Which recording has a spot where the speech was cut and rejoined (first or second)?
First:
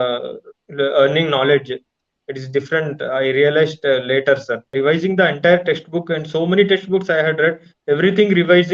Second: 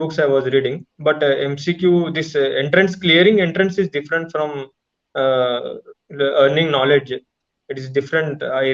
first